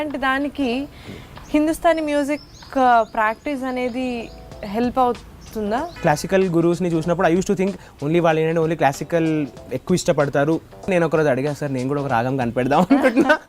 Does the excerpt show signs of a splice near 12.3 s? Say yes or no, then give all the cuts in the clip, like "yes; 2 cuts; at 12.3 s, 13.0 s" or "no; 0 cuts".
no; 2 cuts; at 5.9 s, 10.8 s